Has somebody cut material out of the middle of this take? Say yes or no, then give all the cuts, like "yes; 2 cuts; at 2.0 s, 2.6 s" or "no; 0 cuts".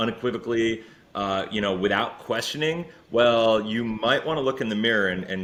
no; 0 cuts